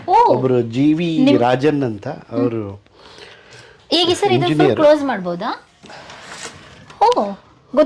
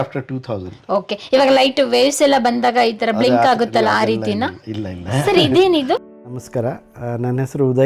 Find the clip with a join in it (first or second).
second